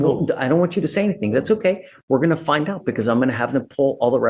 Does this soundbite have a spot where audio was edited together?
no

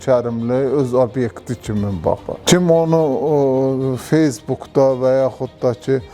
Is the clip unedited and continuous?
no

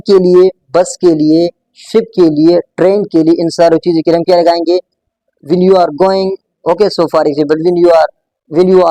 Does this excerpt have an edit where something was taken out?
no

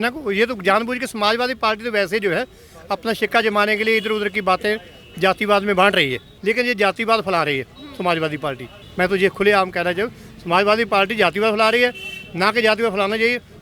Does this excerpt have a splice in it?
no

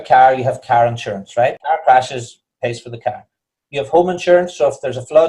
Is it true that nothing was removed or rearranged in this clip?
no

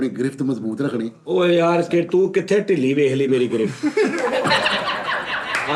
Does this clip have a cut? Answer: no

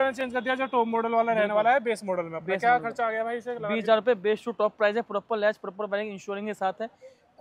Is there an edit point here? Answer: no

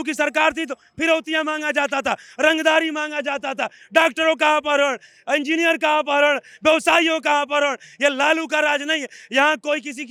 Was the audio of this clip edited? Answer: no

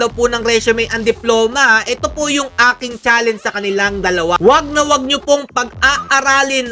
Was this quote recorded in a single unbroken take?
no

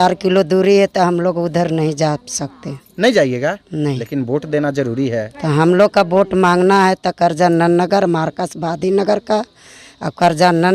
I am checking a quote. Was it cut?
no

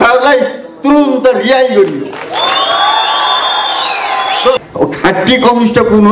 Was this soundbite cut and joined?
yes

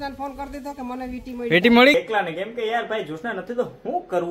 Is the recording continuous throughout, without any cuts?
no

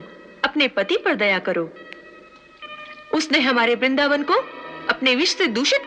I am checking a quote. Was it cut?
no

